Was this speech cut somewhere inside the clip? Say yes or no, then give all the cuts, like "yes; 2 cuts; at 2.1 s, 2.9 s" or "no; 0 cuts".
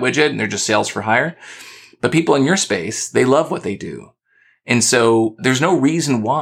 no; 0 cuts